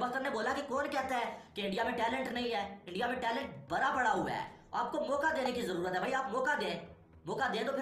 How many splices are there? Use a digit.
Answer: 0